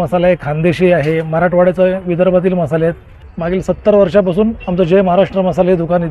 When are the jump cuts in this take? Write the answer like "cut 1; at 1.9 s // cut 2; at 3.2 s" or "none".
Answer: cut 1; at 3.3 s

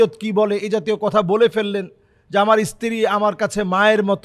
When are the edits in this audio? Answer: none

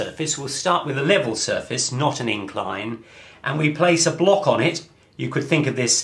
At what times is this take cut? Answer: none

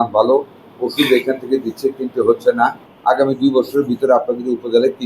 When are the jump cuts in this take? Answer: cut 1; at 2.9 s

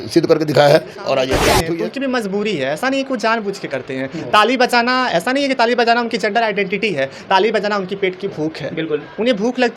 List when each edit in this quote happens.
cut 1; at 1.5 s

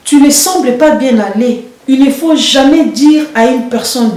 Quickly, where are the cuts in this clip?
none

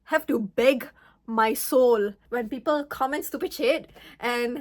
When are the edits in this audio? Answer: cut 1; at 2.2 s

